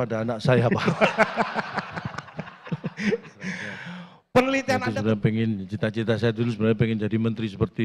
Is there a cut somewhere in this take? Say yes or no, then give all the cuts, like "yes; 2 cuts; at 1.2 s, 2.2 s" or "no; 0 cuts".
yes; 1 cut; at 4.8 s